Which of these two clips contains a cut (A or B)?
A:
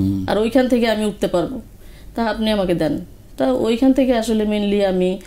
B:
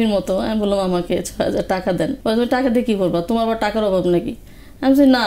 B